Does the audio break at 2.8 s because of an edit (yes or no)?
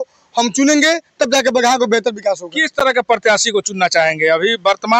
no